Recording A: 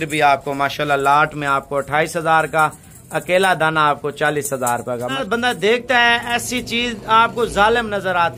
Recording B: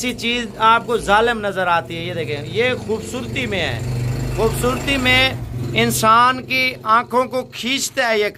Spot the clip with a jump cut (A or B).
A